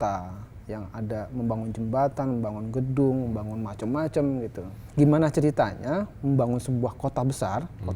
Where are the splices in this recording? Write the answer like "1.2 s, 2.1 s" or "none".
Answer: 4.8 s